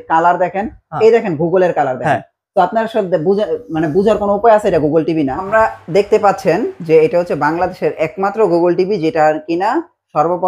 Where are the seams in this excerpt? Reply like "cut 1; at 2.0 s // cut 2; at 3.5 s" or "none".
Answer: none